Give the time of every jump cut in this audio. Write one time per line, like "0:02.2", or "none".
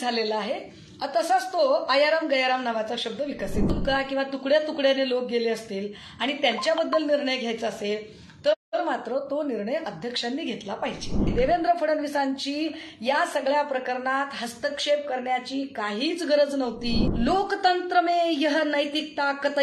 0:03.7
0:11.3
0:17.1